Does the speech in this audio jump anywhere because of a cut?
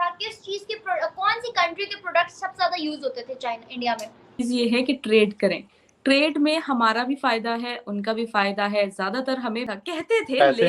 yes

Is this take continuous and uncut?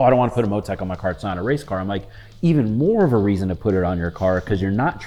yes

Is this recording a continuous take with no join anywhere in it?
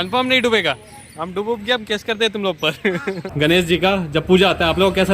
no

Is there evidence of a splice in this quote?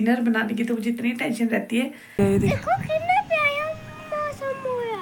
yes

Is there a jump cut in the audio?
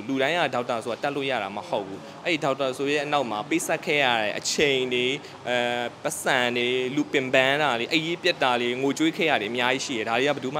no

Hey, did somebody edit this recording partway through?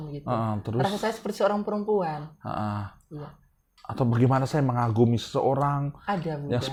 no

